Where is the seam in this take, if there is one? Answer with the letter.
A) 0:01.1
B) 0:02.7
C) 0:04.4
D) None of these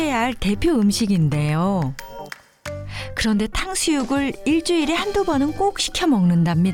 D